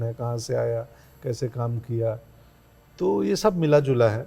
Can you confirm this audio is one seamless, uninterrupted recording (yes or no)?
yes